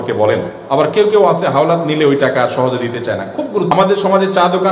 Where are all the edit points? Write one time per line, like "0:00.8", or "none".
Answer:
0:03.7